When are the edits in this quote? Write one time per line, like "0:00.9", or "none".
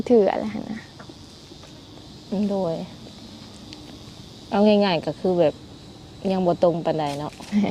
none